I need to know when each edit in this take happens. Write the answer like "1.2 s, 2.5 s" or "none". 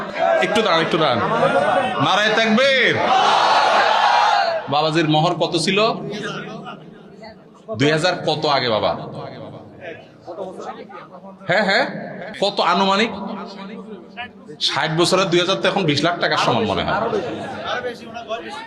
12.2 s